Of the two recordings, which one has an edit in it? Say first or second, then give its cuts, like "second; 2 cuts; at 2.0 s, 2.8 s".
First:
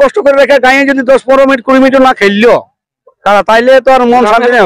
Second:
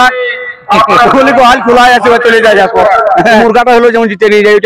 second; 1 cut; at 3.4 s